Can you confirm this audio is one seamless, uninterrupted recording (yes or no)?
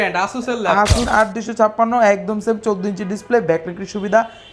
no